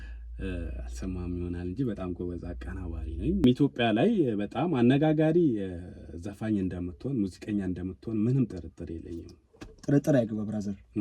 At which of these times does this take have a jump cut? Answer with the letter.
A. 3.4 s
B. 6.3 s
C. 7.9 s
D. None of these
A